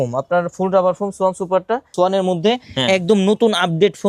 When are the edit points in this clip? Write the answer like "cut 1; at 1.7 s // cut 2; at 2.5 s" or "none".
cut 1; at 1.9 s